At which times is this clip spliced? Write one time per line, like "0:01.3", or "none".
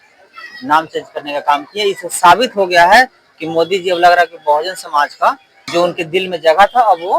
0:05.5

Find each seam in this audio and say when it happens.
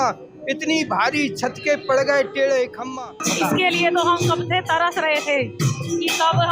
0:03.1

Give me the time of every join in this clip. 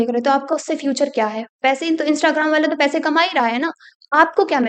none

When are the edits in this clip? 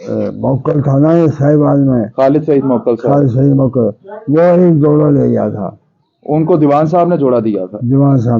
none

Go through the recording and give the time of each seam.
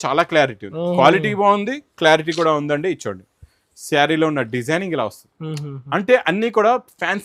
none

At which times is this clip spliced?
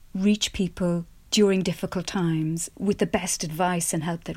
0:02.7

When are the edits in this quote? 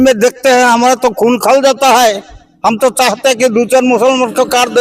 none

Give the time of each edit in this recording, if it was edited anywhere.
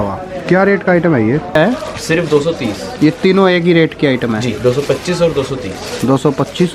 0:01.6

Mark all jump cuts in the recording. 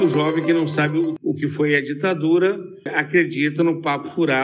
0:01.2
0:03.0

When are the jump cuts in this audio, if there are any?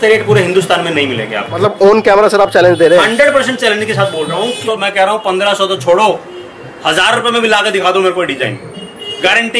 0:01.6
0:04.6

